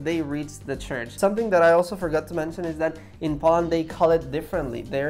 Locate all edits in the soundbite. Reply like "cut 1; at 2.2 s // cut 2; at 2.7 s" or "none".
none